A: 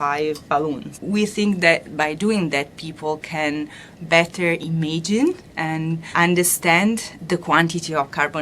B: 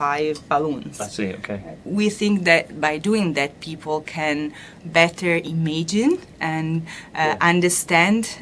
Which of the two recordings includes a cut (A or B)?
A